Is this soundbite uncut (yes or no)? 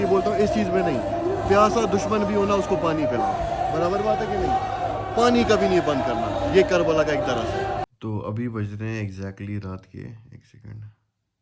yes